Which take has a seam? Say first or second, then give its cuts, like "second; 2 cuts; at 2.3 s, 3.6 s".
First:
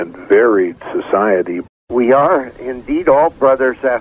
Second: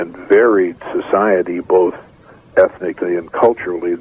first; 1 cut; at 1.6 s